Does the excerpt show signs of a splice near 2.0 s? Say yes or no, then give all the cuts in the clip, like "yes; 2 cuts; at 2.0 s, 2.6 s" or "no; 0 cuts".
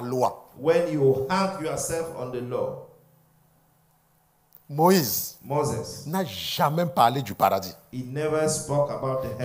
no; 0 cuts